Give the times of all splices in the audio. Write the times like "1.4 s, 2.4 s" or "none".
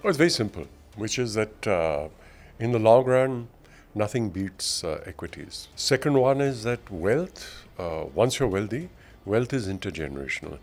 none